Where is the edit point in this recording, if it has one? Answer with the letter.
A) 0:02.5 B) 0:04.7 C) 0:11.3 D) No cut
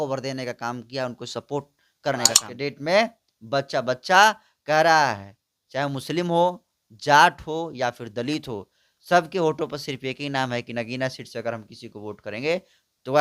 A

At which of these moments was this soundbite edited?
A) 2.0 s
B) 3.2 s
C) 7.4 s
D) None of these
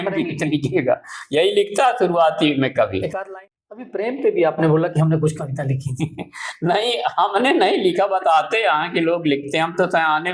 B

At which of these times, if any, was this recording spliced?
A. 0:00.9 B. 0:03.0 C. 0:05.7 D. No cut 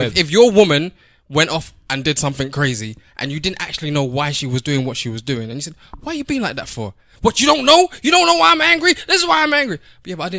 D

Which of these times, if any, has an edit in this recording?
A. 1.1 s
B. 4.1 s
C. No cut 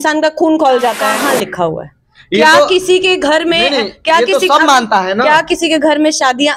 A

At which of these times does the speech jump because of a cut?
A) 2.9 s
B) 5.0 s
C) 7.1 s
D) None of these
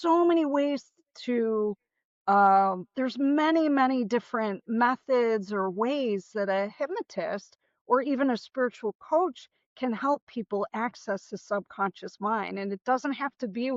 D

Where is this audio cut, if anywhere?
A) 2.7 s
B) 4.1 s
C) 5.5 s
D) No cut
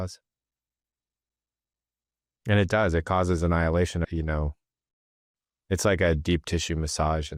B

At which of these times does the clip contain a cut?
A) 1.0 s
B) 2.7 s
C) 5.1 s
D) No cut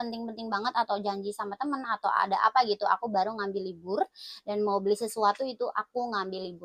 D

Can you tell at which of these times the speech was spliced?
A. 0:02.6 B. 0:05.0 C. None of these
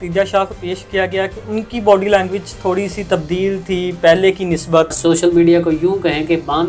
B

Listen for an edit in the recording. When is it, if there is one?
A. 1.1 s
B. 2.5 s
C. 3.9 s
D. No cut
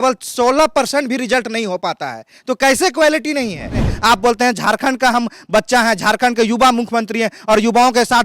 C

